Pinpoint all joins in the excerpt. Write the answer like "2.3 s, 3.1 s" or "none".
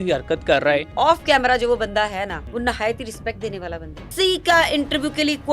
0.9 s, 2.4 s, 4.1 s